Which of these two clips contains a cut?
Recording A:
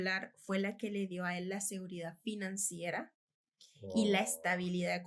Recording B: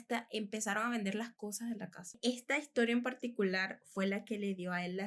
B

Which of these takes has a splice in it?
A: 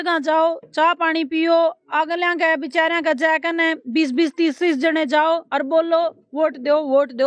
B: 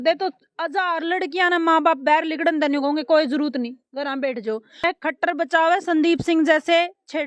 B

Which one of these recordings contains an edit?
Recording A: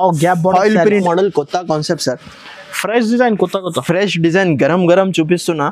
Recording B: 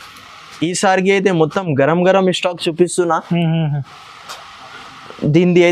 A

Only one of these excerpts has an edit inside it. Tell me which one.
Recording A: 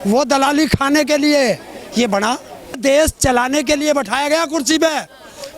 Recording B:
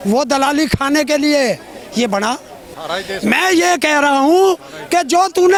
A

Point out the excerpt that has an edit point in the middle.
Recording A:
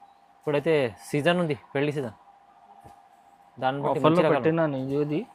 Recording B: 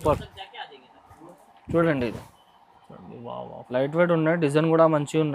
B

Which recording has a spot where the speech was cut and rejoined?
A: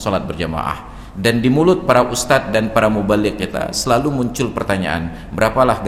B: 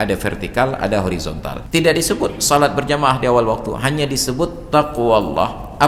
B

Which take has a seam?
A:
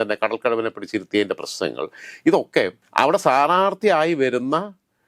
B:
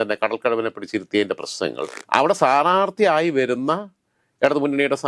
B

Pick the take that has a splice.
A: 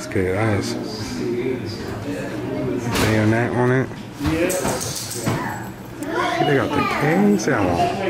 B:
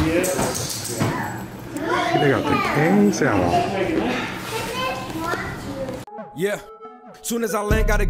B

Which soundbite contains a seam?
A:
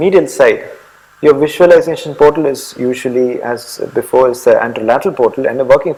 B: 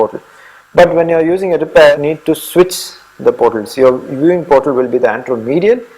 B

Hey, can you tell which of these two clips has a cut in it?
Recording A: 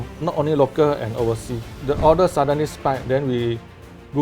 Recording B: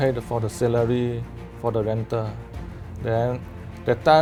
A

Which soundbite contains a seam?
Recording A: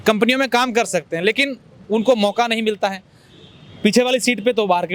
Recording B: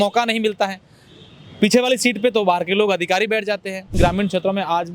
B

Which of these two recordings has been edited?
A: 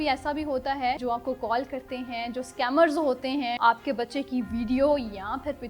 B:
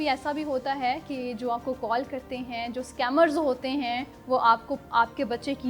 A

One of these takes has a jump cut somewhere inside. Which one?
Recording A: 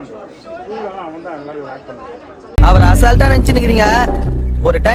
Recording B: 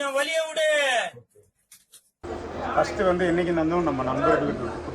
B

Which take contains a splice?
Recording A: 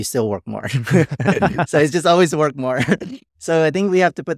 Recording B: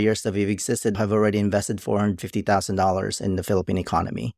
B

